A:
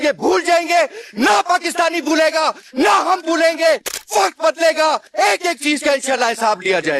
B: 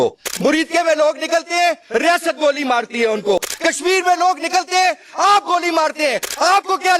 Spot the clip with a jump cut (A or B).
B